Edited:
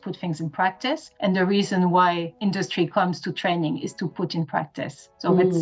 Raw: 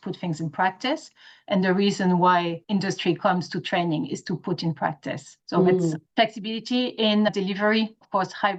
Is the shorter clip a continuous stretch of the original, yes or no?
no